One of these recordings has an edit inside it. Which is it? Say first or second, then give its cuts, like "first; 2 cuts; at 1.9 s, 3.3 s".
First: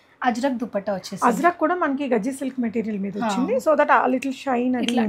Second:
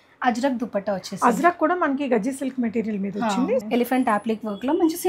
second; 1 cut; at 3.6 s